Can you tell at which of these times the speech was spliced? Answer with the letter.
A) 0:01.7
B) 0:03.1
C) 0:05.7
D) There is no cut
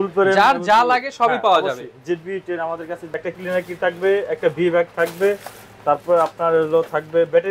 B